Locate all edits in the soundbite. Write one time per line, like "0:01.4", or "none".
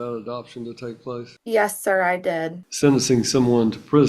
0:01.3
0:02.6